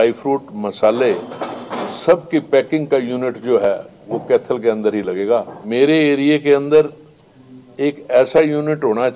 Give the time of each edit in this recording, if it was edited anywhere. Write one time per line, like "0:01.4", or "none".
0:05.6